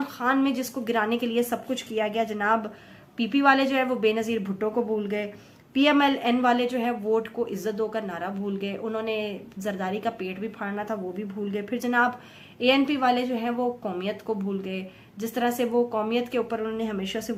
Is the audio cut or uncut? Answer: uncut